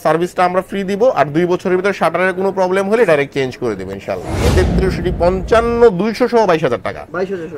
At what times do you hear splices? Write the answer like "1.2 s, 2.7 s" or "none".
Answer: 4.5 s